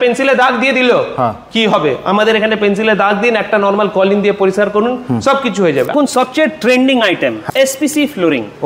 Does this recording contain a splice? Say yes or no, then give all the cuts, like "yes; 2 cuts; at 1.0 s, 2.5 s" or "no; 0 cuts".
yes; 2 cuts; at 5.9 s, 7.4 s